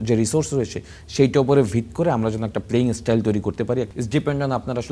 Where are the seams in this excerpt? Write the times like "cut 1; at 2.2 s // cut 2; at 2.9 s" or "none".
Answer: cut 1; at 3.9 s